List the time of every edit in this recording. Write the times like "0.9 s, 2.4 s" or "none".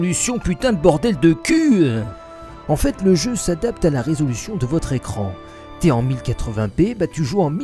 none